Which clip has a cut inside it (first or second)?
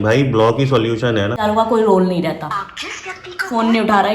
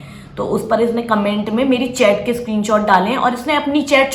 first